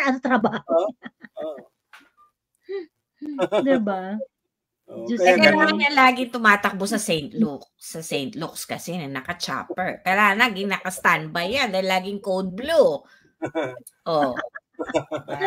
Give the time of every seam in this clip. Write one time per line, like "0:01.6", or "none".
none

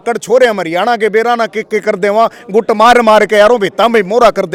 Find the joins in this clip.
none

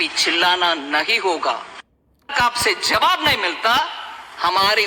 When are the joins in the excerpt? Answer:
0:02.3

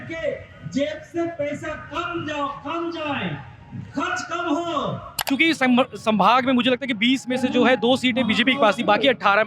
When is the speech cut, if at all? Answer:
0:05.1

